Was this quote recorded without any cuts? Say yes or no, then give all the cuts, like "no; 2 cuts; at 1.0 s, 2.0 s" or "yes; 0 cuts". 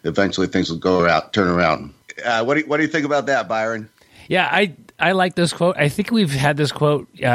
no; 1 cut; at 2.0 s